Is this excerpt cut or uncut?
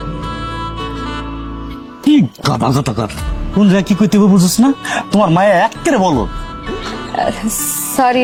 uncut